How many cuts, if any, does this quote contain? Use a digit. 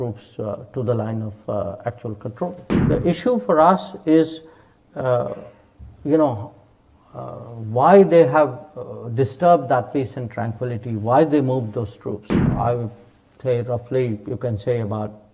2